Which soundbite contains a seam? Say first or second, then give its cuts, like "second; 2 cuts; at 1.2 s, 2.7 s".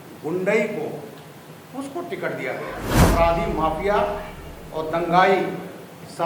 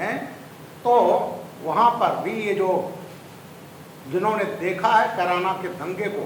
first; 1 cut; at 3.0 s